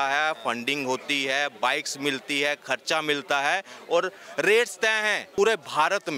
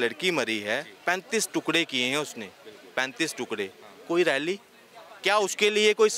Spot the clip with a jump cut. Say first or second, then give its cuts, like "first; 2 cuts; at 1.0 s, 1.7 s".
first; 1 cut; at 5.3 s